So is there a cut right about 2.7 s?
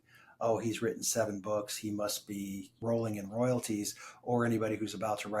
yes; 1 cut; at 2.7 s

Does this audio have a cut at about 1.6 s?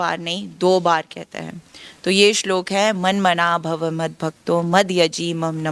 no; 0 cuts

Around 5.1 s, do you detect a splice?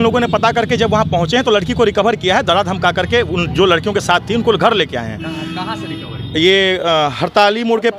no; 0 cuts

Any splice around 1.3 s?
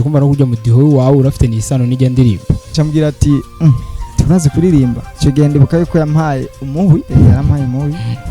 no; 3 cuts; at 2.7 s, 5.1 s, 7.1 s

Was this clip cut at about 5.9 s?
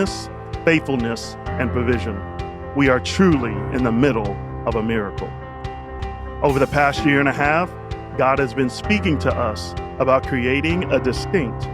yes; 1 cut; at 5.9 s

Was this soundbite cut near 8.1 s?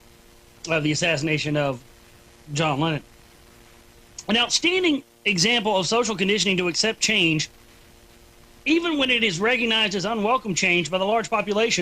no; 1 cut; at 9.4 s

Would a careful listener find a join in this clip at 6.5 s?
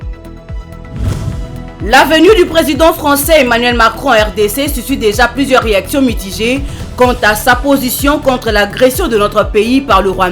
no; 1 cut; at 0.9 s

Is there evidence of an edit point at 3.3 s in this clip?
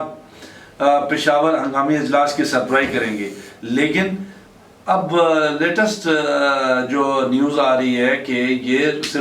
no; 0 cuts

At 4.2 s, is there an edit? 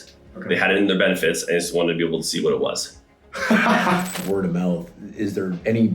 yes; 1 cut; at 4.2 s

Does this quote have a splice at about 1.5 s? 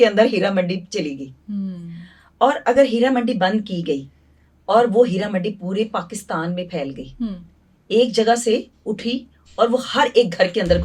no; 0 cuts

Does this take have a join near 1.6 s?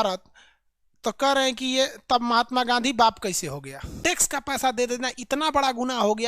no; 1 cut; at 3.9 s

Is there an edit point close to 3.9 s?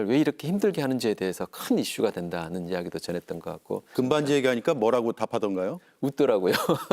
yes; 1 cut; at 3.9 s

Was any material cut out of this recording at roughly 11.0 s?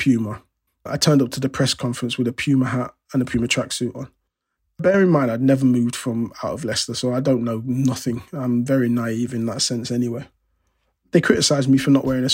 yes; 1 cut; at 11.0 s

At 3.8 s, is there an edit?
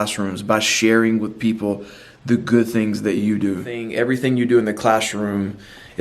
yes; 1 cut; at 3.8 s

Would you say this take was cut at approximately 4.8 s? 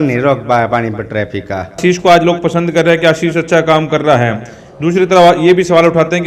no; 1 cut; at 1.8 s

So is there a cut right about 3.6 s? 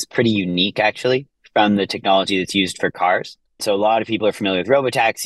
yes; 1 cut; at 3.6 s

